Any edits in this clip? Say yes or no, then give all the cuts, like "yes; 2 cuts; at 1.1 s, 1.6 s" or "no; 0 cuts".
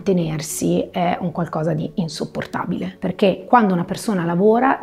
yes; 1 cut; at 2.9 s